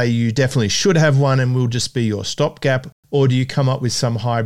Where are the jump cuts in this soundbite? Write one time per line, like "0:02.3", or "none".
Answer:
0:02.9